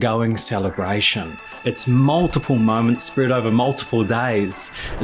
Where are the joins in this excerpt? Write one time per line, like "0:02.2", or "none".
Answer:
0:01.5